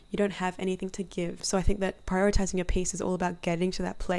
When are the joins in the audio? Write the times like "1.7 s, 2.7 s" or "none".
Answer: 1.4 s